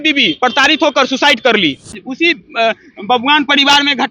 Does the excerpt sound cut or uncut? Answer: cut